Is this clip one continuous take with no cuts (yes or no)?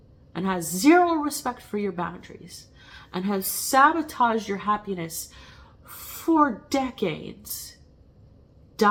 yes